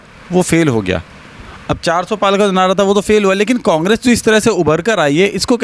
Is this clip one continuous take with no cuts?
yes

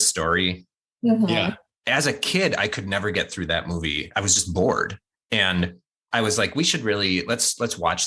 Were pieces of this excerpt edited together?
yes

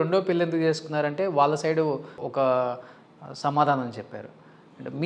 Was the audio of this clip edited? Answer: yes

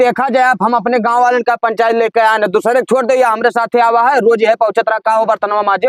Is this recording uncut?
yes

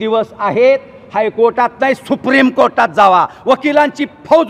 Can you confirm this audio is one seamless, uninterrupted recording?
yes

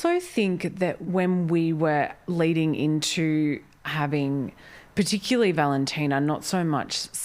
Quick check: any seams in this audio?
yes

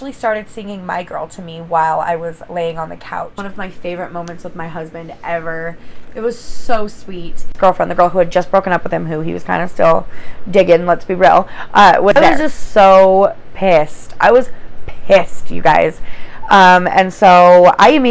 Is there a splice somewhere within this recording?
yes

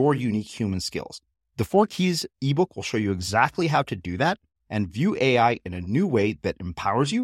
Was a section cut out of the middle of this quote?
no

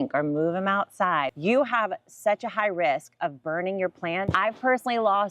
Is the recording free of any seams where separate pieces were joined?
no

